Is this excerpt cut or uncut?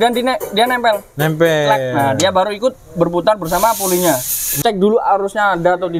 cut